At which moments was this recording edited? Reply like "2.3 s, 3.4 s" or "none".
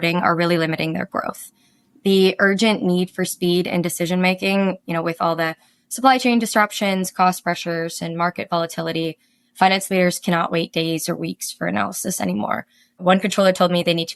none